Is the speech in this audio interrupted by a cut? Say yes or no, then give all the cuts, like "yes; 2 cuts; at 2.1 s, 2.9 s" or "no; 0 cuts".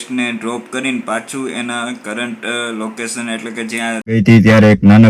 yes; 1 cut; at 4.1 s